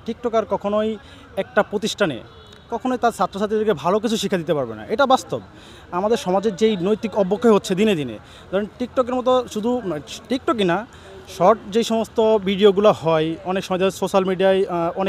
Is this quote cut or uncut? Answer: uncut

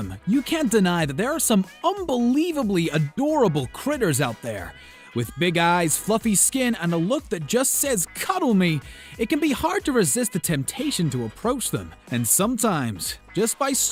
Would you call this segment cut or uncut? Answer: uncut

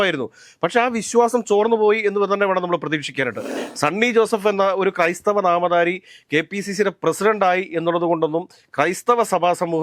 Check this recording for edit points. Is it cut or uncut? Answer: cut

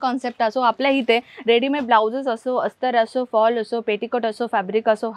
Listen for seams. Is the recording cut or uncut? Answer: uncut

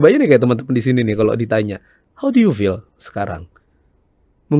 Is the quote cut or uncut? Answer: uncut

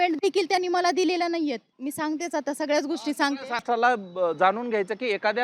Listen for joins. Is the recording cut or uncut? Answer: cut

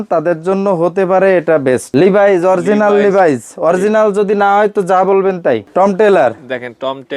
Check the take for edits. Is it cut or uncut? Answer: cut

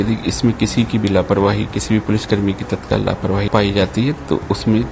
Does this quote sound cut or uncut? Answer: cut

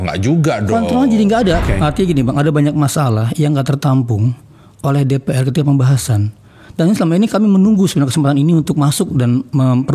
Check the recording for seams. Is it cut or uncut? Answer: cut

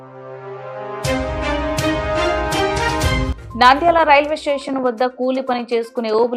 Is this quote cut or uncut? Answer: cut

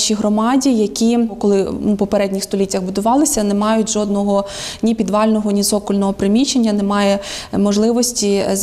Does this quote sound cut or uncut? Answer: uncut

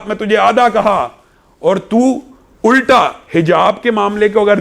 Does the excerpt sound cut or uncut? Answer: uncut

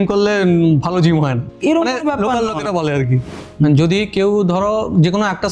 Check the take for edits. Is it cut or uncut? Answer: cut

